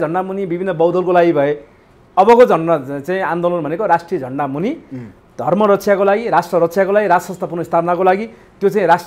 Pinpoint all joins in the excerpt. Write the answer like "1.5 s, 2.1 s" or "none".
none